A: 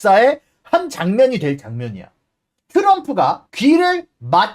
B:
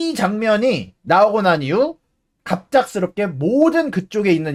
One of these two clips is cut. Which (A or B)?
A